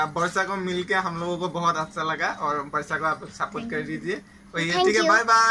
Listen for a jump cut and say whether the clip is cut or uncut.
uncut